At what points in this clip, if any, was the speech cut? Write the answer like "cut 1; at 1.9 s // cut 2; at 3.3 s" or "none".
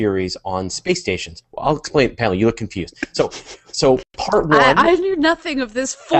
cut 1; at 1.8 s